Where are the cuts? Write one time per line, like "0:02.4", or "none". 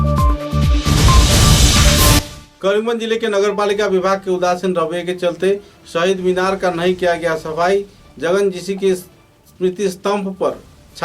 0:02.3